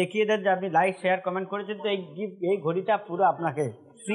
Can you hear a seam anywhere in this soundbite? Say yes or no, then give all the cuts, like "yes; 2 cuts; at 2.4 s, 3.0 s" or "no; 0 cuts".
no; 0 cuts